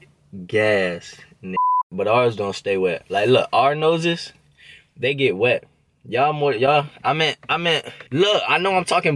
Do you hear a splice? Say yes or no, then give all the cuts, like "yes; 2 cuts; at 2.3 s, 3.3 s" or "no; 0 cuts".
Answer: yes; 1 cut; at 1.9 s